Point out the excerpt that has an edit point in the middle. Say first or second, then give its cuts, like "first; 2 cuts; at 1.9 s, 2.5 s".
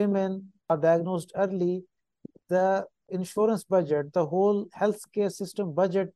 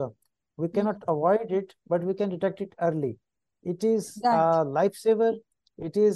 first; 2 cuts; at 0.7 s, 3.1 s